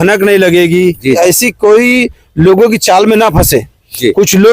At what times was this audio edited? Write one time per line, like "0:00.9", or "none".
0:01.2